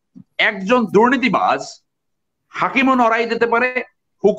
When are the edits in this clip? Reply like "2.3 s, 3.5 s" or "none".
none